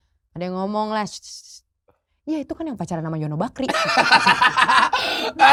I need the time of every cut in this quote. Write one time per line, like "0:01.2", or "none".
none